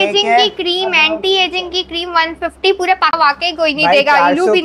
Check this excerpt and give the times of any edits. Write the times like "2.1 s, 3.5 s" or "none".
3.2 s